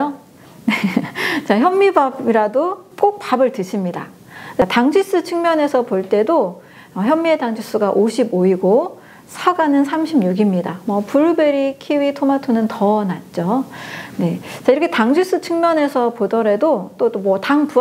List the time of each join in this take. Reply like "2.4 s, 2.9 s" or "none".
4.6 s